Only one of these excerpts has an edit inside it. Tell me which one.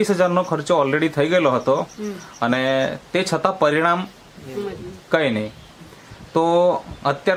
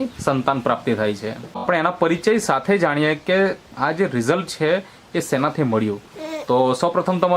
second; 1 cut; at 1.6 s

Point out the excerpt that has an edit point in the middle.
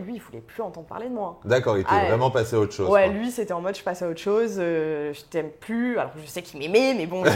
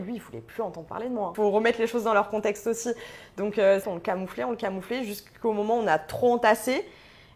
second; 2 cuts; at 1.3 s, 3.8 s

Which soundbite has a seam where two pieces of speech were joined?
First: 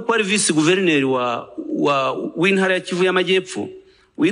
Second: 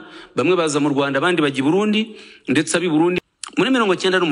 second; 1 cut; at 3.2 s

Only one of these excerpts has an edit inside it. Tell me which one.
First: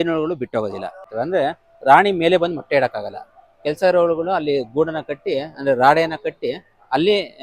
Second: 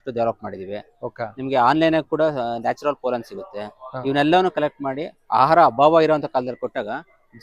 first; 1 cut; at 1.0 s

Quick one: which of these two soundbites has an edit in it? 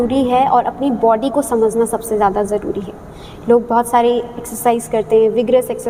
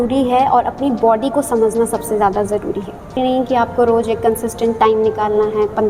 second; 1 cut; at 3.2 s

